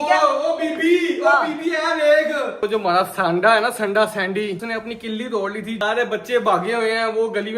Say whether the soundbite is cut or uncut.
cut